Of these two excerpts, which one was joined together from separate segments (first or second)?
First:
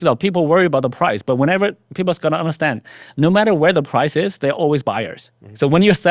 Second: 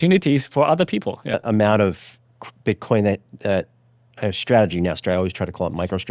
second